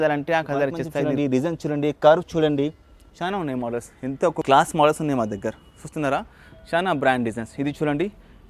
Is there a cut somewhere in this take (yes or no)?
yes